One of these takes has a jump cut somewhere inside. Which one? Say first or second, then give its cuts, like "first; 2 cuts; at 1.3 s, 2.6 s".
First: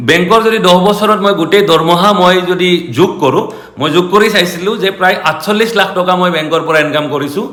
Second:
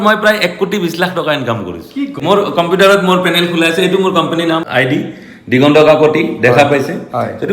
second; 2 cuts; at 2.2 s, 4.7 s